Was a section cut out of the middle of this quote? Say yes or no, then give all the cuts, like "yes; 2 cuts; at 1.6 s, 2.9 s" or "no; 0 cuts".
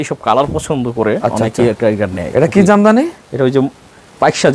no; 0 cuts